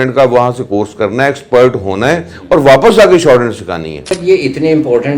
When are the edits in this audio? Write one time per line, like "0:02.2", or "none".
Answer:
0:04.1